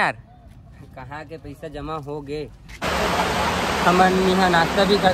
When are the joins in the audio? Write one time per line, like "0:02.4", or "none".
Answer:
0:02.8